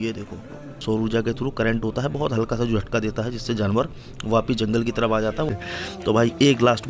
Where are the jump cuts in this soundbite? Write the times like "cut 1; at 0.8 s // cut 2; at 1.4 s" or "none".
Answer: cut 1; at 0.8 s // cut 2; at 5.5 s

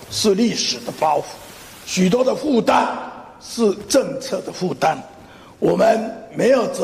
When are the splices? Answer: none

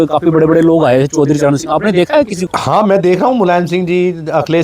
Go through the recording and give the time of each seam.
cut 1; at 2.5 s

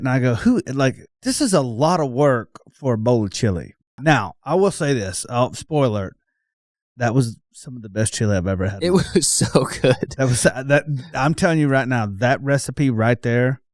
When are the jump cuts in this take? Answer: cut 1; at 1.1 s // cut 2; at 4.0 s

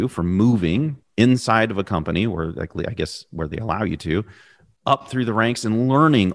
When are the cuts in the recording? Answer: cut 1; at 1.0 s

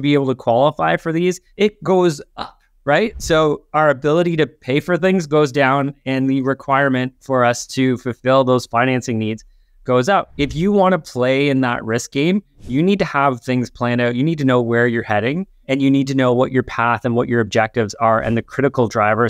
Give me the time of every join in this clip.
cut 1; at 1.5 s // cut 2; at 10.3 s // cut 3; at 15.5 s

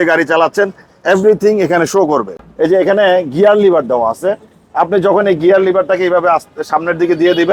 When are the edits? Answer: cut 1; at 2.4 s

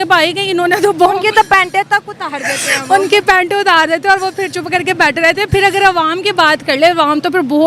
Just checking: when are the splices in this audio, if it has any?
none

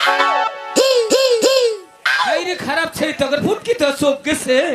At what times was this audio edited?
cut 1; at 1.9 s

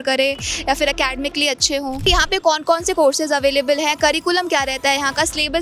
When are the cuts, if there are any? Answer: cut 1; at 2.1 s

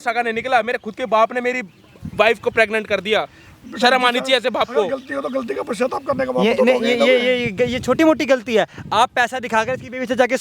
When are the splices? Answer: none

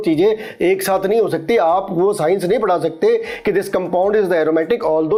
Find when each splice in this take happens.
none

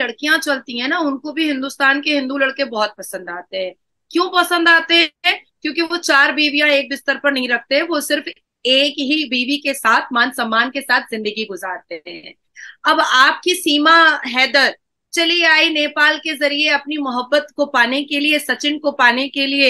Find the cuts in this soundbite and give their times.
none

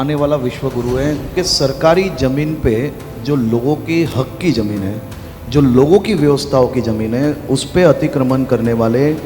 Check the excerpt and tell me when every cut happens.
cut 1; at 1.3 s

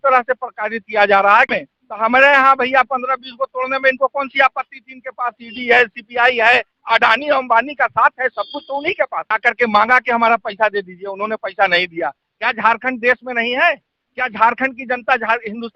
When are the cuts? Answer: cut 1; at 1.6 s // cut 2; at 9.3 s

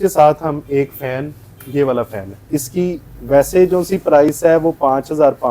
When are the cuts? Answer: cut 1; at 2.5 s

